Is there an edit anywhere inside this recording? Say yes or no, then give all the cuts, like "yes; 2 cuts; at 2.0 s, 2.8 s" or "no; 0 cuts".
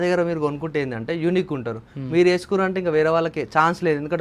no; 0 cuts